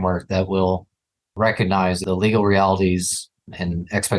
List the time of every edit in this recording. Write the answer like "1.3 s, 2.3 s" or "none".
2.0 s